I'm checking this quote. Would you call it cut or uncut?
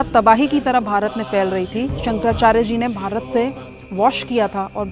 cut